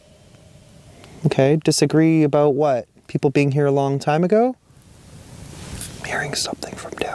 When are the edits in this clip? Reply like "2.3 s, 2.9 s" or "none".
3.0 s, 5.0 s